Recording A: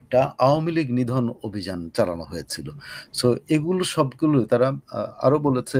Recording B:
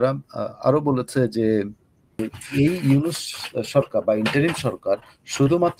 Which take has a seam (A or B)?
B